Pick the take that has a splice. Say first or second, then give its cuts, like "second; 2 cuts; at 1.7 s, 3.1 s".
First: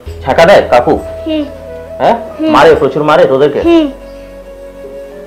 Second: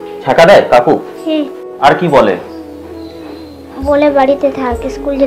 second; 1 cut; at 1.6 s